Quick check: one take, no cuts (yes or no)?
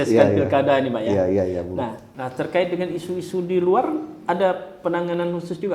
no